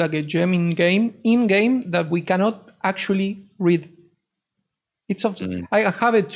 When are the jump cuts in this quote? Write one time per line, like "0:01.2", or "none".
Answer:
none